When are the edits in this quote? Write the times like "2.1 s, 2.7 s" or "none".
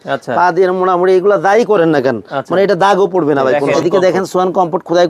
3.7 s